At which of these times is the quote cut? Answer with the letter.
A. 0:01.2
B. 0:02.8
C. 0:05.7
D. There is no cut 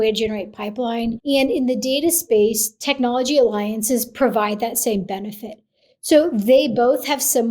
A